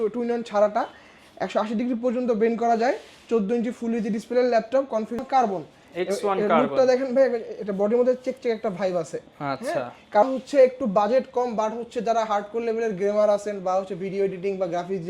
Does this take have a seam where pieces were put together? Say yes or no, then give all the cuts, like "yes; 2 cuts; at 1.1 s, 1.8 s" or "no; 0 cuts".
yes; 2 cuts; at 5.2 s, 10.2 s